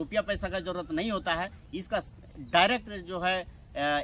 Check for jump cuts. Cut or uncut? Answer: uncut